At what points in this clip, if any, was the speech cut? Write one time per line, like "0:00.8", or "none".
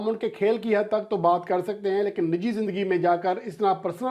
none